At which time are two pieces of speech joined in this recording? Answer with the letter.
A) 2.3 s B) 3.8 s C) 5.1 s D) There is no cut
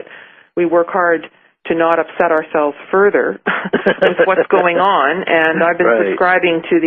A